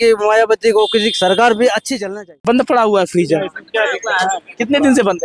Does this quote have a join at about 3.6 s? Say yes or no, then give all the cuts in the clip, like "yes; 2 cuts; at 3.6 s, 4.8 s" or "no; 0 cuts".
no; 1 cut; at 2.3 s